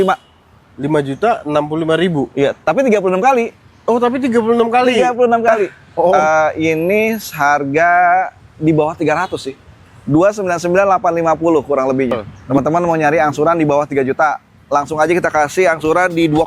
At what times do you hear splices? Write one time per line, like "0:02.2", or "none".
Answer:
0:06.2
0:12.3